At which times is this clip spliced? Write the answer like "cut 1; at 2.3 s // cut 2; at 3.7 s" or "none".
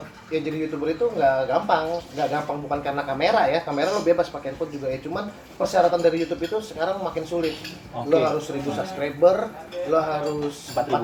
none